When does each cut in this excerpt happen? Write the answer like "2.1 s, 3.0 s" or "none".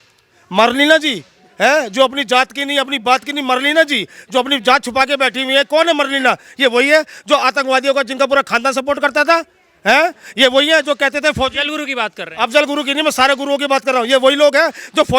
none